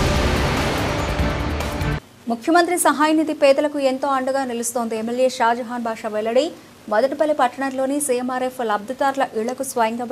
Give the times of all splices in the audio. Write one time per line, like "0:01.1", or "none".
0:01.6